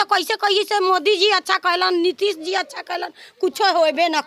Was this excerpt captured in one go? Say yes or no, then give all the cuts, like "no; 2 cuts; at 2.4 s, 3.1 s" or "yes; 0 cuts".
yes; 0 cuts